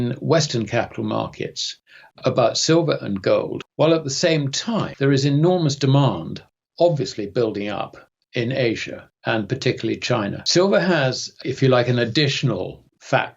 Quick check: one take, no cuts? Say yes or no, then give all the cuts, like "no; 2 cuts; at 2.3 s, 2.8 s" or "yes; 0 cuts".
no; 4 cuts; at 3.6 s, 4.9 s, 10.4 s, 11.3 s